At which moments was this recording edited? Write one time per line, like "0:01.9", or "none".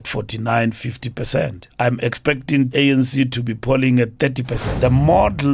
0:01.6
0:02.7
0:04.7